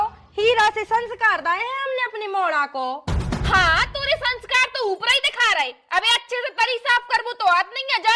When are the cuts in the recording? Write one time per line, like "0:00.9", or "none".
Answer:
none